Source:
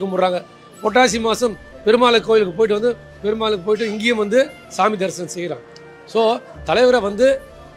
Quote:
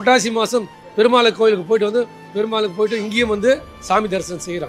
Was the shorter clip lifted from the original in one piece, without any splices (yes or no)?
yes